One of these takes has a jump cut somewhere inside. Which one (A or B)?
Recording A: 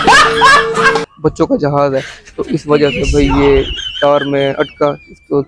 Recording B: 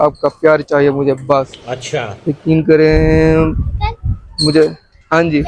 A